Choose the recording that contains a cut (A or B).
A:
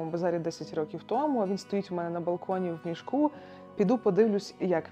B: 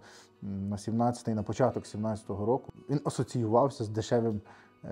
B